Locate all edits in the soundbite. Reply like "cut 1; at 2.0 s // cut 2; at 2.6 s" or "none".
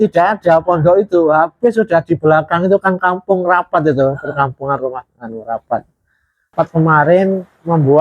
cut 1; at 6.5 s